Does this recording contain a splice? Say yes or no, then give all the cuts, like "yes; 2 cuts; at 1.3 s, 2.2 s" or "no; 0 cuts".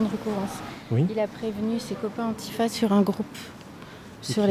no; 0 cuts